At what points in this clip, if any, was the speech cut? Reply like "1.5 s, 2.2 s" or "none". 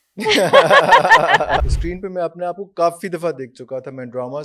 1.7 s

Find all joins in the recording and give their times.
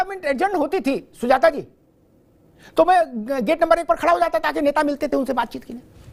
none

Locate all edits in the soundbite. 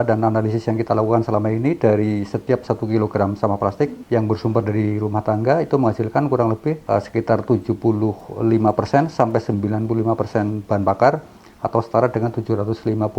4.0 s, 6.8 s

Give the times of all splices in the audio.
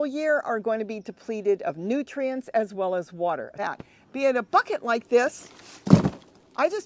3.5 s

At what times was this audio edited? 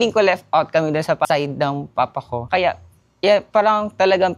1.2 s, 2.4 s

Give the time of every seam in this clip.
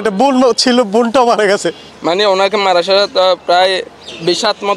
1.9 s

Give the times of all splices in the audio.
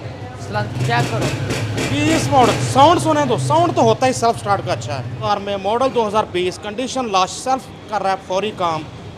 5.2 s

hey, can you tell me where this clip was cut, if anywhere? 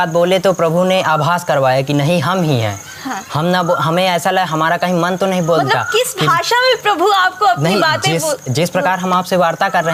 none

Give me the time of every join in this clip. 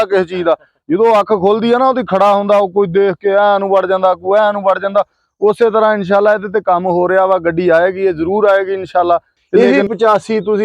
9.4 s

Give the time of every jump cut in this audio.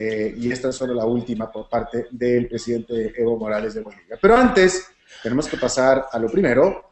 1.6 s

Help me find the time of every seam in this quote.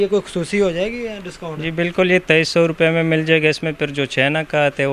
none

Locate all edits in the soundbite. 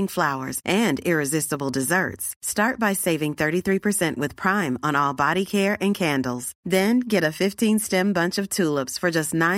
none

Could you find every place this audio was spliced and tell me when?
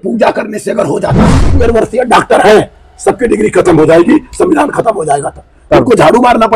1.4 s

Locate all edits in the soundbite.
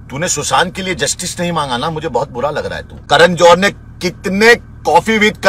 3.0 s

